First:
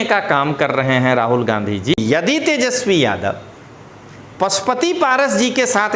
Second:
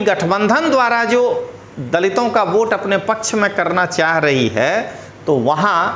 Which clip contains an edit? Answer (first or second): first